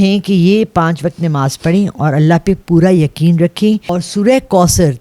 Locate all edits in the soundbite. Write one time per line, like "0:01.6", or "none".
0:03.9